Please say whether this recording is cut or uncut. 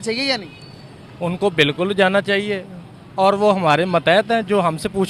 uncut